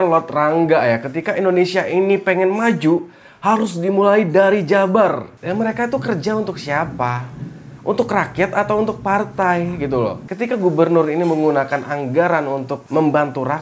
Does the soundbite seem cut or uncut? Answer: cut